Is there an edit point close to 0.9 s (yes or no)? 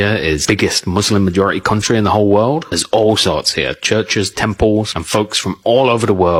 no